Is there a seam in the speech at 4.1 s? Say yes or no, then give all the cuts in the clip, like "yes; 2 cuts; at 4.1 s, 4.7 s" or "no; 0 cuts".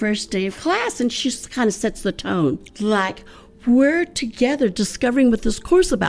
no; 2 cuts; at 1.2 s, 2.7 s